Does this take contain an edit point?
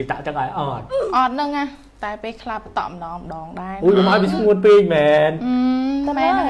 no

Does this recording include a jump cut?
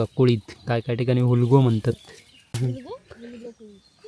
yes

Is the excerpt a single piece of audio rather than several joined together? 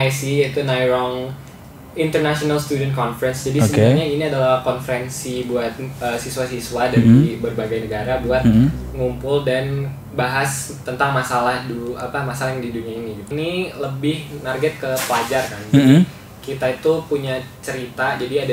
no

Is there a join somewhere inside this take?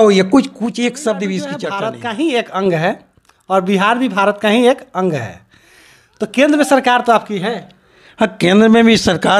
yes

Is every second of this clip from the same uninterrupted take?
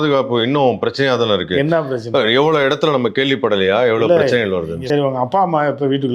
no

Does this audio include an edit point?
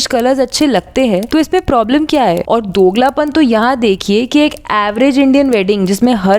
yes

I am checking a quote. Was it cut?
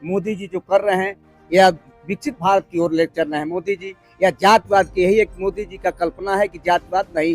no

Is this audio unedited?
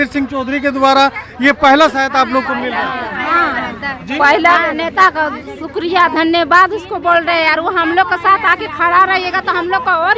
yes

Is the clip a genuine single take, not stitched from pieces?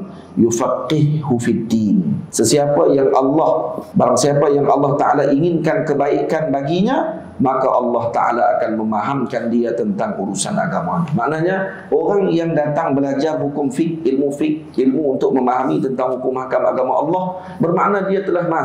no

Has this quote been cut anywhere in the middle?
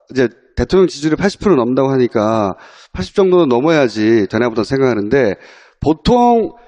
no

